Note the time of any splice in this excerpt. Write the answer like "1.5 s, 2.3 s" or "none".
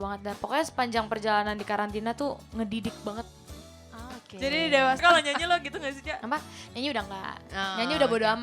5.0 s